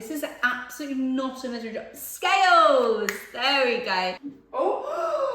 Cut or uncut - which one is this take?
cut